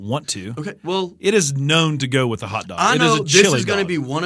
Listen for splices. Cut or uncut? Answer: uncut